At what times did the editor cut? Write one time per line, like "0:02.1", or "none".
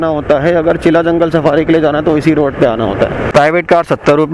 0:03.2